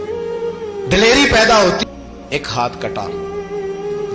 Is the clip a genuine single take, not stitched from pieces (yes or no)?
no